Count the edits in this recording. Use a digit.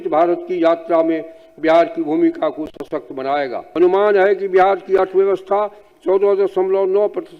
1